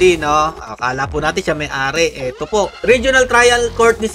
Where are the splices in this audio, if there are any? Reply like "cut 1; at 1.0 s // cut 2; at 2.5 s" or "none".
cut 1; at 2.8 s